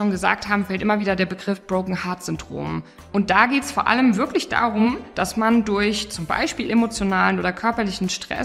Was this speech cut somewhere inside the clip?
yes; 1 cut; at 2.9 s

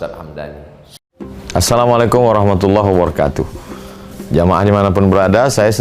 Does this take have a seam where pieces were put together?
yes; 1 cut; at 1.0 s

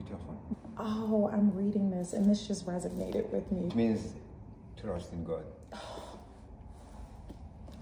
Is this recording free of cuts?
no; 1 cut; at 3.7 s

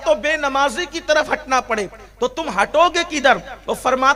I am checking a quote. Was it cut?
no; 0 cuts

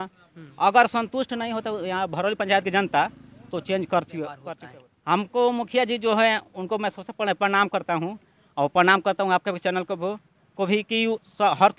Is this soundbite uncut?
no; 1 cut; at 4.5 s

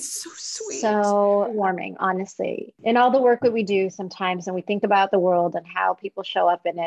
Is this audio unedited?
no; 2 cuts; at 1.5 s, 2.7 s

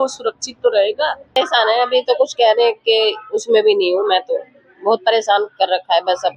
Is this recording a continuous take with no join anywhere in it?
no; 1 cut; at 1.4 s

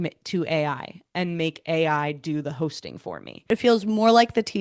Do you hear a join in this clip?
yes; 1 cut; at 3.5 s

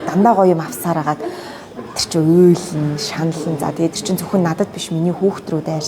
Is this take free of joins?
yes; 0 cuts

